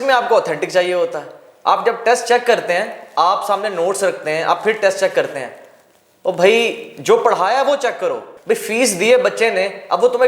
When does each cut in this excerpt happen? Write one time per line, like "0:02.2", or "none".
0:08.3